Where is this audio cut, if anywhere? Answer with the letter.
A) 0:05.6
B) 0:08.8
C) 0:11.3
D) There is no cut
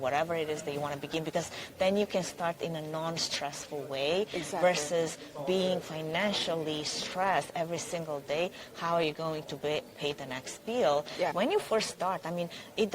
C